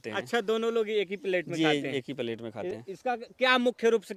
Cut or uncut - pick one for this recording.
uncut